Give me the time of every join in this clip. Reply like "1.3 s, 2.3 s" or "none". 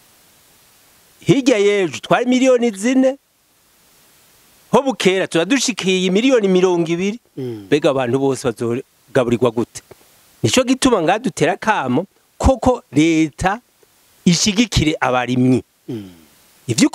none